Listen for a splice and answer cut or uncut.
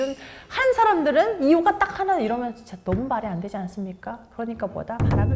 uncut